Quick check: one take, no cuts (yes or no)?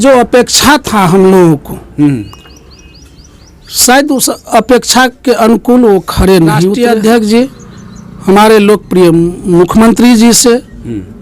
no